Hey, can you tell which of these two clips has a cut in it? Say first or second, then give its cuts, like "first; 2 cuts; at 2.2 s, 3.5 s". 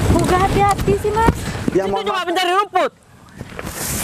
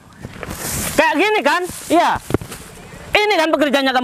first; 1 cut; at 2.1 s